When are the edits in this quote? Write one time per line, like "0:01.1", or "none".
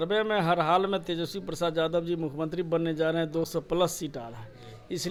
none